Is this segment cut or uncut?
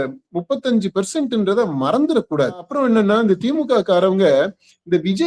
cut